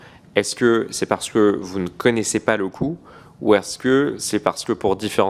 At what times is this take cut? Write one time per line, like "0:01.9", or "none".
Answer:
none